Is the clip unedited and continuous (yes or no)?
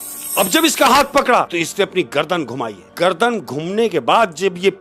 no